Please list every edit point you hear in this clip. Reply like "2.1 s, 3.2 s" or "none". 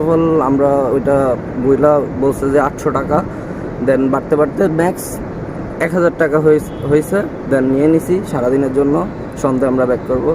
none